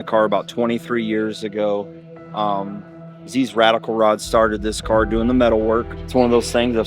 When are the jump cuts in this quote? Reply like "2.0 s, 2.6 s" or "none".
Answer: 6.0 s